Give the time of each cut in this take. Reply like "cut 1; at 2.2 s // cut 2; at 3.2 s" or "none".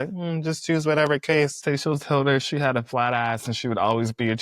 cut 1; at 1.6 s